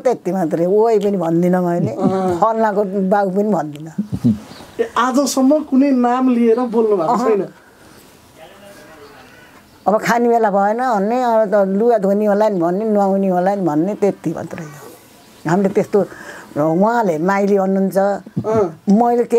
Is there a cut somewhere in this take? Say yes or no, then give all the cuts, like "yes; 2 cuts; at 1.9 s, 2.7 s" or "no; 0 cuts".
no; 0 cuts